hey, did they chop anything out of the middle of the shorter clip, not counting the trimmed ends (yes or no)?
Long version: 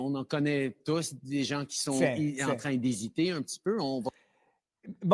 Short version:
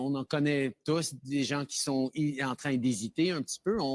no